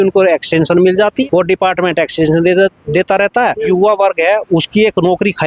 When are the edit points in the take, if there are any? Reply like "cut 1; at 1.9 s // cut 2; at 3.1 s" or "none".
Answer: cut 1; at 1.2 s // cut 2; at 3.7 s